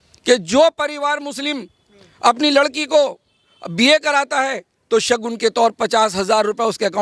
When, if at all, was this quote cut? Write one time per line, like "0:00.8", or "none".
none